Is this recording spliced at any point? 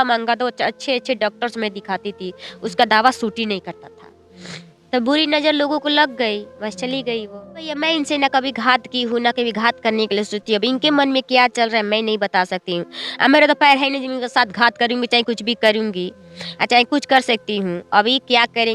yes; 1 cut; at 7.7 s

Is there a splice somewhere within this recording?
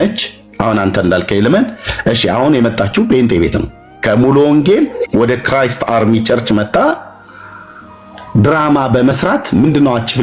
no; 0 cuts

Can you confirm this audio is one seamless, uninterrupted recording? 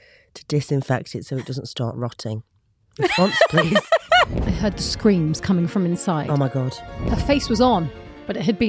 no; 2 cuts; at 4.3 s, 6.8 s

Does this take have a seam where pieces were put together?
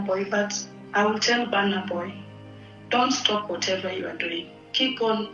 no; 0 cuts

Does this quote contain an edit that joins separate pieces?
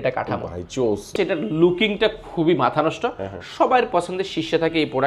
yes; 1 cut; at 1.1 s

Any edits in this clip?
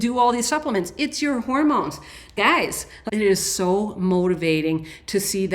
yes; 1 cut; at 2.9 s

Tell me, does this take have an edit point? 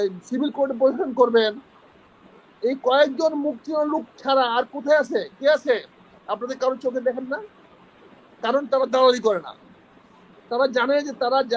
no; 0 cuts

